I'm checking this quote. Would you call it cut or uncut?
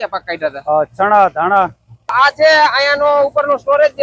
cut